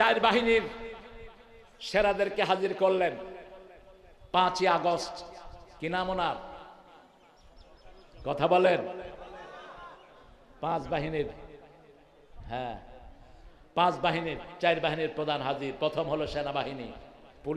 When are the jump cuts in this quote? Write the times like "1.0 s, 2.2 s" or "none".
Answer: none